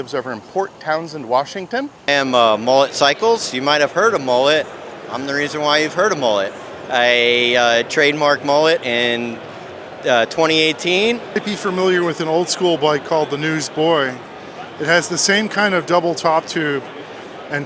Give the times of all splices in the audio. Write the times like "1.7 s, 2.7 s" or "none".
2.1 s, 11.4 s